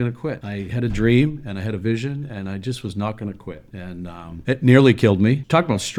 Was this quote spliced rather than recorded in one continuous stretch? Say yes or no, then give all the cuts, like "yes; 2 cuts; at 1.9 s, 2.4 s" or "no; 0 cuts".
no; 0 cuts